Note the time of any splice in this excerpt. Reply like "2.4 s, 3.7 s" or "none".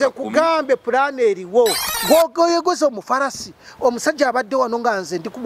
1.8 s